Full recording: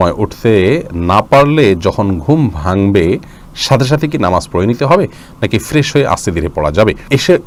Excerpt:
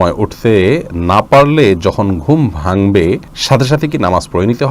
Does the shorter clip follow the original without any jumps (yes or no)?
no